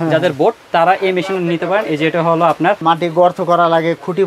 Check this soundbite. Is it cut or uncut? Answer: cut